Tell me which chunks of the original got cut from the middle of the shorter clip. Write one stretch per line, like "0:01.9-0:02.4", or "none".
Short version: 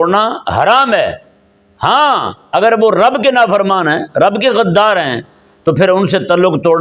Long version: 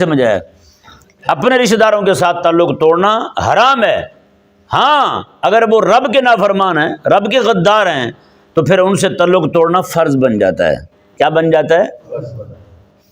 none